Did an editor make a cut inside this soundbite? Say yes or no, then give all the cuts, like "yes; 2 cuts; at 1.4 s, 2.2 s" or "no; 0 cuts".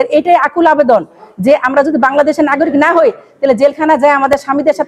no; 0 cuts